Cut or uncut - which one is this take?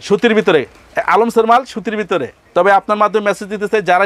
cut